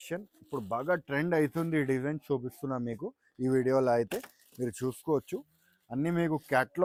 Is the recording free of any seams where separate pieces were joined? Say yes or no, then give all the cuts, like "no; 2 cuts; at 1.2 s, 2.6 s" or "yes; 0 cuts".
yes; 0 cuts